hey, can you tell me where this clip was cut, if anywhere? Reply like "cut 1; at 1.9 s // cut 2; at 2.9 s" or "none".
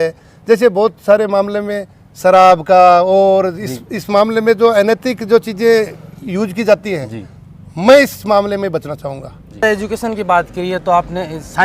cut 1; at 9.6 s